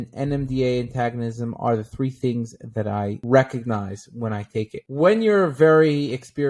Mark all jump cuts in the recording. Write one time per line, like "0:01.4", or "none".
0:04.8